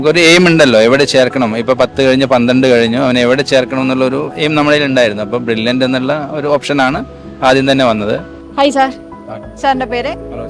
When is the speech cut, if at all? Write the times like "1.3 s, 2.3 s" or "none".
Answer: none